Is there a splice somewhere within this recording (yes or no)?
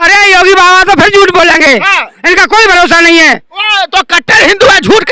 no